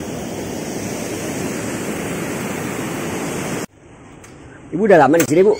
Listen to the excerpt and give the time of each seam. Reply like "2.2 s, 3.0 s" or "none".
3.6 s